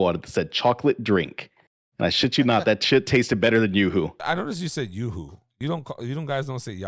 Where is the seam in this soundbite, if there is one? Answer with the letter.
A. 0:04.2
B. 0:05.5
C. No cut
A